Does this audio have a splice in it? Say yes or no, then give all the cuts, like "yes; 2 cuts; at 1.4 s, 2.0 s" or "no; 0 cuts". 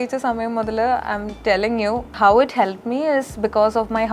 yes; 1 cut; at 2.1 s